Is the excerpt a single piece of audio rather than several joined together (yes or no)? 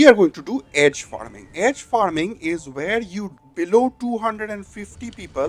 no